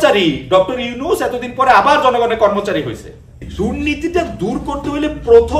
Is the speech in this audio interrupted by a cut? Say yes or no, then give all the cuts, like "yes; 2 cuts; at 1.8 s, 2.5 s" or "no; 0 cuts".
yes; 1 cut; at 3.4 s